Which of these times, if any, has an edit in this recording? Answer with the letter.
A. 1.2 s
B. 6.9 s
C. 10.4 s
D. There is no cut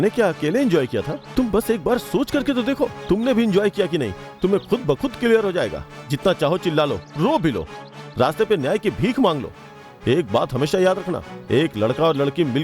A